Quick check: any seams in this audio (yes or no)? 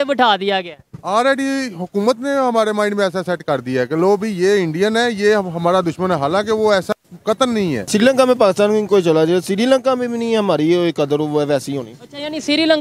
yes